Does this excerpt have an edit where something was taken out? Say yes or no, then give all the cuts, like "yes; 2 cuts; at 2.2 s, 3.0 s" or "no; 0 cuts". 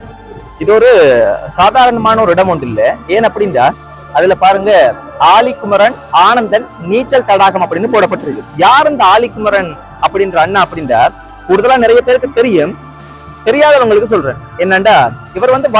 no; 0 cuts